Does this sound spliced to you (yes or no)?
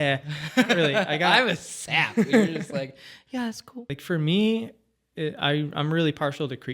yes